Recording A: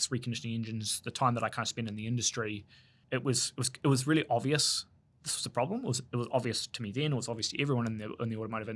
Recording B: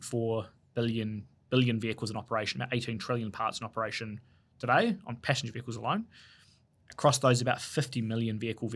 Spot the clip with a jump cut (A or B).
A